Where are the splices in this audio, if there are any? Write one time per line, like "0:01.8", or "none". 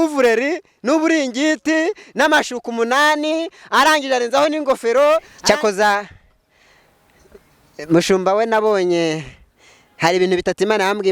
0:05.3